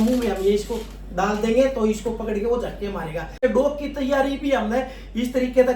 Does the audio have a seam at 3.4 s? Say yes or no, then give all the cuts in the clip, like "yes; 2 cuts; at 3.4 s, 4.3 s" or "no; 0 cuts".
yes; 1 cut; at 3.4 s